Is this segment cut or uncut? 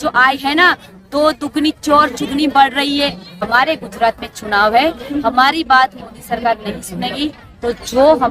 cut